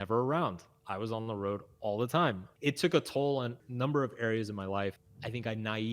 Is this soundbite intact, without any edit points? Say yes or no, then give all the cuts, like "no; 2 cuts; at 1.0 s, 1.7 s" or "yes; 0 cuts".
no; 3 cuts; at 2.5 s, 3.6 s, 5.0 s